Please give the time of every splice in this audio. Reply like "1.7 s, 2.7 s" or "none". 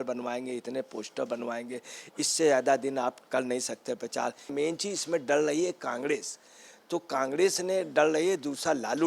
4.5 s